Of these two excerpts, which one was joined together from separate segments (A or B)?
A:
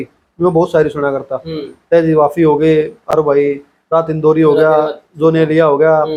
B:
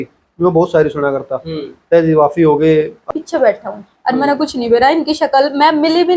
B